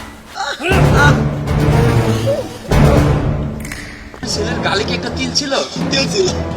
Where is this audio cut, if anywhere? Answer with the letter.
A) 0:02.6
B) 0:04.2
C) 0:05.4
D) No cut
B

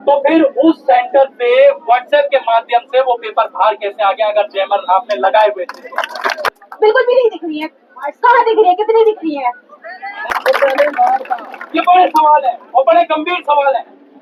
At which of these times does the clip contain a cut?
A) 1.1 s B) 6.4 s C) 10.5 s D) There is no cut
D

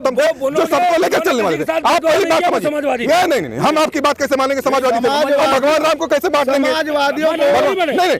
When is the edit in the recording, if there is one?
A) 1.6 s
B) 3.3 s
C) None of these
C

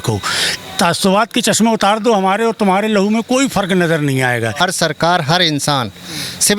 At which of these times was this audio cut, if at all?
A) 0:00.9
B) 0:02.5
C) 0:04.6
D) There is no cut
C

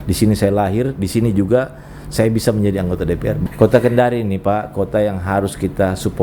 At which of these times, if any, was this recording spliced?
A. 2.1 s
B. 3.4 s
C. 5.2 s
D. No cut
B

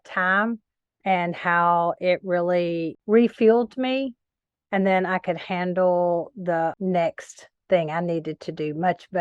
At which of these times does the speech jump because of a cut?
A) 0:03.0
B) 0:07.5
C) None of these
C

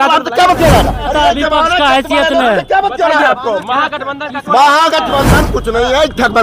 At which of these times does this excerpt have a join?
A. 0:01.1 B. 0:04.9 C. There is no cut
A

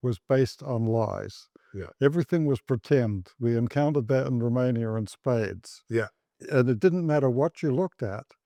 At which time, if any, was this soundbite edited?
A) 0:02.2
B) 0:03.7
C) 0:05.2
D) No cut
D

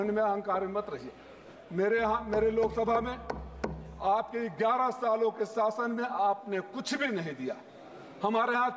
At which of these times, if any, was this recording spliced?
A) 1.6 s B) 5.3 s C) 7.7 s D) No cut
A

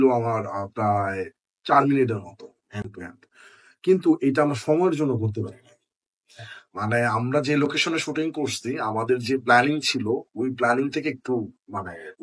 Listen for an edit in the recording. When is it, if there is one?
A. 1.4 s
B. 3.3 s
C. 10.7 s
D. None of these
D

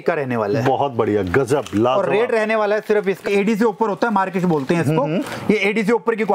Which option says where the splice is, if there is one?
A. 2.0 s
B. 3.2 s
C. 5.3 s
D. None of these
B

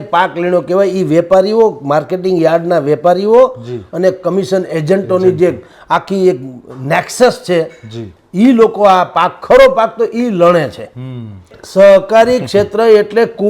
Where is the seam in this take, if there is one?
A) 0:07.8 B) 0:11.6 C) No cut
B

